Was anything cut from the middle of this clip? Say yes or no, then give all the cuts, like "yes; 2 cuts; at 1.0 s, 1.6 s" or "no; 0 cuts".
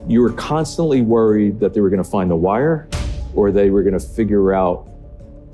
no; 0 cuts